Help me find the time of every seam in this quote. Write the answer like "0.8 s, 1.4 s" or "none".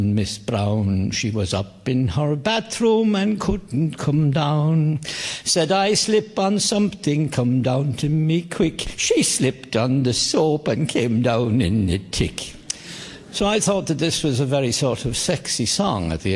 none